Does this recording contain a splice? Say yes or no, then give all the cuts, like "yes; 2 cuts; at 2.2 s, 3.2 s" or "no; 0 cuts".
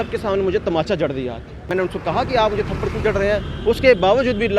yes; 1 cut; at 1.7 s